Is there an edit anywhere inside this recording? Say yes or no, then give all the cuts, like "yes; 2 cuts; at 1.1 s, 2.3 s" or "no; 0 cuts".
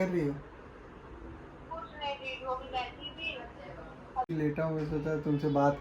yes; 1 cut; at 4.3 s